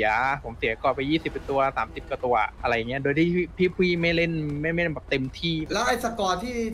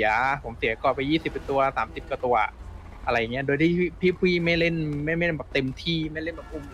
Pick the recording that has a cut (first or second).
first